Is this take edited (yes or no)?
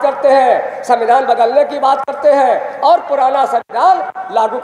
no